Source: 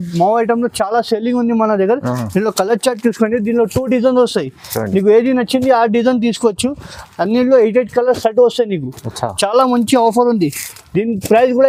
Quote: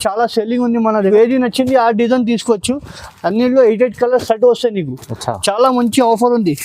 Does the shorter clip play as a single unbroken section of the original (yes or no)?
no